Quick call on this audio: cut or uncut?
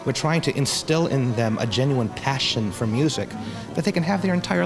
uncut